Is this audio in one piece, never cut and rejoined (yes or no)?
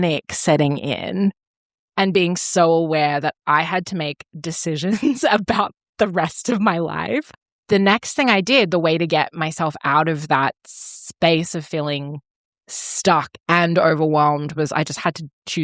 no